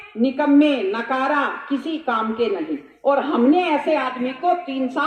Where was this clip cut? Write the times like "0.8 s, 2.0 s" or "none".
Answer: none